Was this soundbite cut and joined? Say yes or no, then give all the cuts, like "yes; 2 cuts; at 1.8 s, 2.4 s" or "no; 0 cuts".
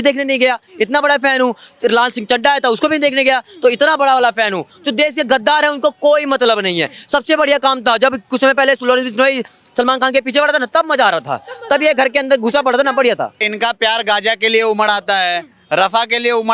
yes; 2 cuts; at 4.7 s, 13.4 s